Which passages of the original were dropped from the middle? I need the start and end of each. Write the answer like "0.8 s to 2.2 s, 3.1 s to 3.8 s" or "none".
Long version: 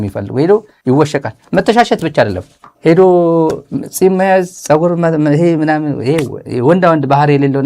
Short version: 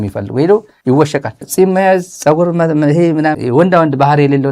1.4 s to 3.8 s, 5.8 s to 6.5 s